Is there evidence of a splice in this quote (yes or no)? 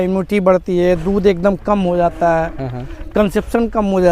no